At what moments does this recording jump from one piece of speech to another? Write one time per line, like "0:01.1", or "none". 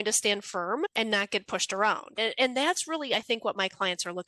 0:00.9
0:02.2